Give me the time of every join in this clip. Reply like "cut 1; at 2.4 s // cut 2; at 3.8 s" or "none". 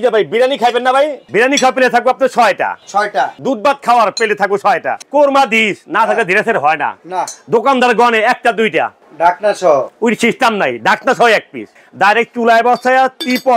cut 1; at 1.2 s // cut 2; at 3.4 s // cut 3; at 5.0 s // cut 4; at 11.7 s